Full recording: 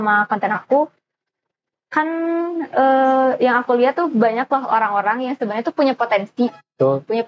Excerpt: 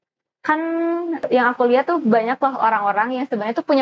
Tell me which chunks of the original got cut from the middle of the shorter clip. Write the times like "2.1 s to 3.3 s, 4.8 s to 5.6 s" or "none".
2.7 s to 3.3 s